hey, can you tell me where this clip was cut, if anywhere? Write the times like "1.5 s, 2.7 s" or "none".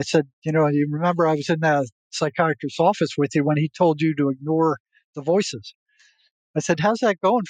2.0 s